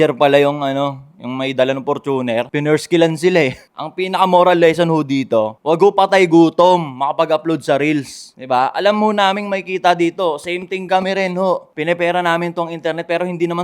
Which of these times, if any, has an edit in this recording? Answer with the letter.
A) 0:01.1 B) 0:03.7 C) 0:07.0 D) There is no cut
B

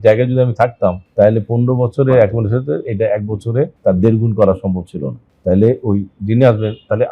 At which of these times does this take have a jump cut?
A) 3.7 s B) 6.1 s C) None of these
A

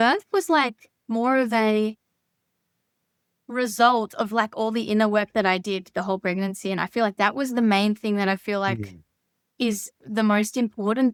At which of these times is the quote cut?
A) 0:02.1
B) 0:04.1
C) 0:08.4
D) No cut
D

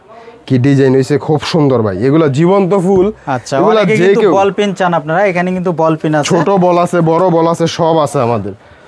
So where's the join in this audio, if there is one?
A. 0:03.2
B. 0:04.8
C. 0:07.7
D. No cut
D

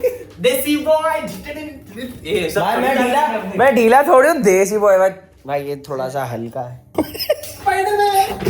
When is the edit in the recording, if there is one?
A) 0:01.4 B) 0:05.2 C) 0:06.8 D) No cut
C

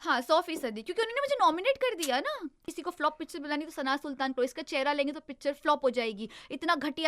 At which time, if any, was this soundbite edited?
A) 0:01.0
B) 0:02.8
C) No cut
B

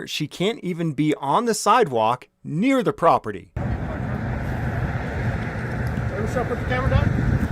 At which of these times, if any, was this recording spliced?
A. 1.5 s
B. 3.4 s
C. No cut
B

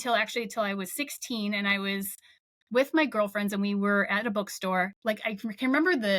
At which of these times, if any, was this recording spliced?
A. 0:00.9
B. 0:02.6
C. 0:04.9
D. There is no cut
C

